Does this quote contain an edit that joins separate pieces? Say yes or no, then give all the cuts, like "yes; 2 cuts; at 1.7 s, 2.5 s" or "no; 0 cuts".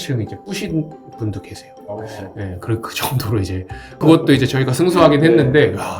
yes; 1 cut; at 4.0 s